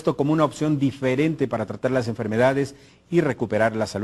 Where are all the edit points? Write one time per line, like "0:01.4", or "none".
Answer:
0:01.4